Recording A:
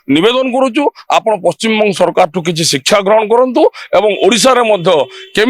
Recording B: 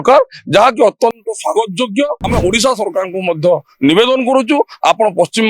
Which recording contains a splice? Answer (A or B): B